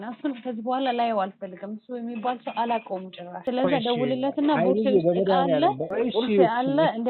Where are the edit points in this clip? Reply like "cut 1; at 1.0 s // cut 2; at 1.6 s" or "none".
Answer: none